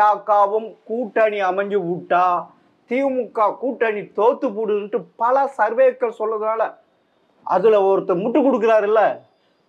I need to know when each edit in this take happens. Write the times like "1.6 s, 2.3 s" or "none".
none